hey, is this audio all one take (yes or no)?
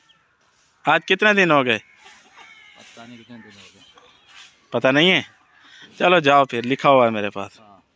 yes